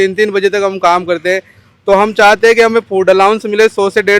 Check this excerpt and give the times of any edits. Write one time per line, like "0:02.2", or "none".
none